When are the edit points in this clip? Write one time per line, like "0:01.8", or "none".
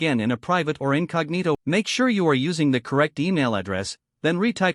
0:01.6